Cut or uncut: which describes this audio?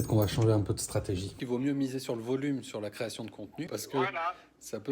cut